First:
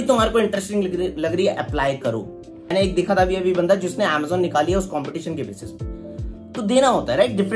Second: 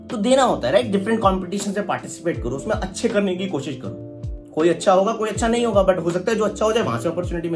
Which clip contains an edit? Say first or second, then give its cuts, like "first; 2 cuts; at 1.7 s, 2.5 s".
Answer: first; 1 cut; at 2.5 s